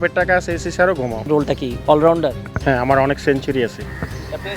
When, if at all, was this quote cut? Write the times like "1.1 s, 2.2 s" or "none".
1.3 s, 2.5 s